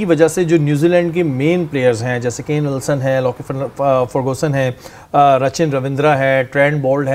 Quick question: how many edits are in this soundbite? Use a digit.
0